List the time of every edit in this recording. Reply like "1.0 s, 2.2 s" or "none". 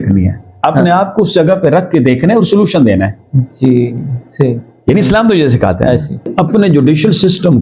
6.3 s